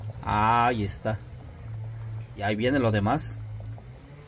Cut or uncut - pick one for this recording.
cut